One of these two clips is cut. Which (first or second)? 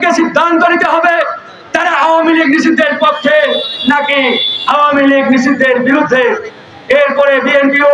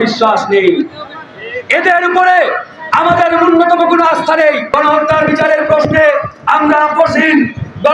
second